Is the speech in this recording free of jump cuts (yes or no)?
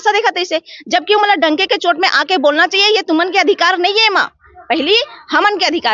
yes